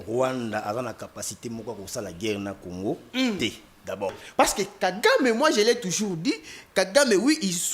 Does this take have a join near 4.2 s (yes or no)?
yes